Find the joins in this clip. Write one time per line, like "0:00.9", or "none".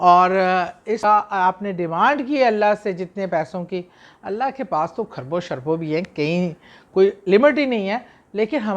0:01.0